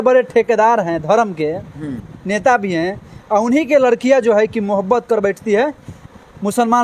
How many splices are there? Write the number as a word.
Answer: zero